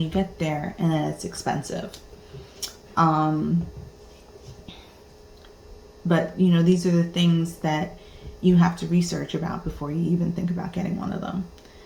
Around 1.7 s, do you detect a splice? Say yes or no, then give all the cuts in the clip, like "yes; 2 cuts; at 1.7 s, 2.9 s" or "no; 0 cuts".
no; 0 cuts